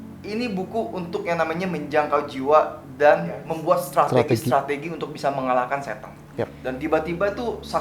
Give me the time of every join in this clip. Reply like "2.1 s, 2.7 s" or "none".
3.5 s, 6.6 s